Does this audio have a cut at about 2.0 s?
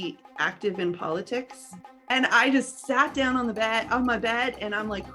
yes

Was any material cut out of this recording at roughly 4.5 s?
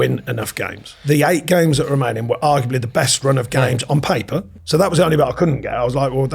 yes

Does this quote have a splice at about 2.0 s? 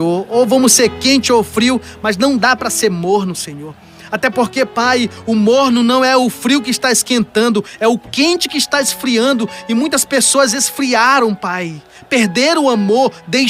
no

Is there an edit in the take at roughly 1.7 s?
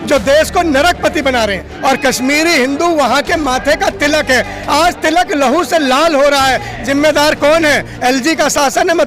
yes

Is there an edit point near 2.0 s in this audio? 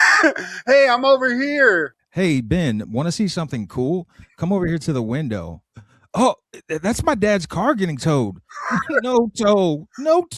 yes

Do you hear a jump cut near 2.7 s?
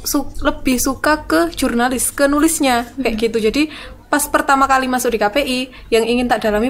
no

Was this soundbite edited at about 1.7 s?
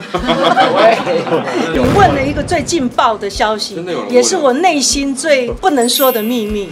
no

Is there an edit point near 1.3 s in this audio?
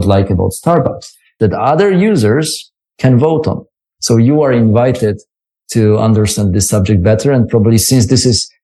yes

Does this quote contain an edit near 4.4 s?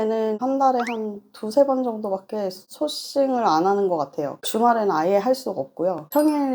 yes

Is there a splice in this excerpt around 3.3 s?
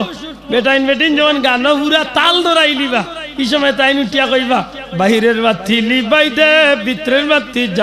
no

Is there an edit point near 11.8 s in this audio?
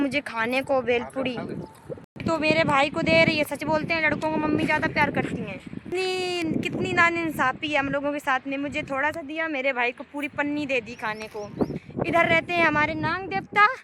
yes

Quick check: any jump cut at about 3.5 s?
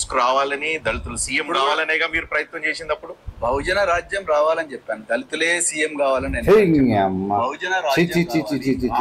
no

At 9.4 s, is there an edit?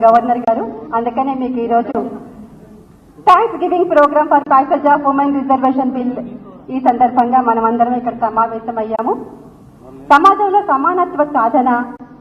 no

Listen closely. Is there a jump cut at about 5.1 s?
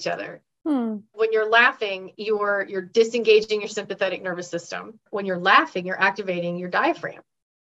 yes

